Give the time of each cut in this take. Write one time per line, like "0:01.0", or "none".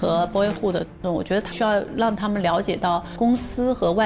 0:01.0